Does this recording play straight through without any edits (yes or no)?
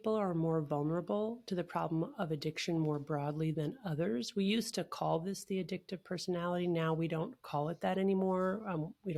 yes